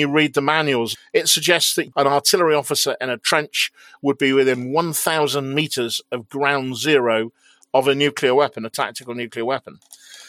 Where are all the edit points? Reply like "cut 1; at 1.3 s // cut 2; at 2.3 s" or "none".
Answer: cut 1; at 0.9 s // cut 2; at 1.9 s